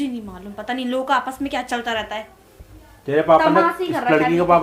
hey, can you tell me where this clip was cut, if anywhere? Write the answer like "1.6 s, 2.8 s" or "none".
none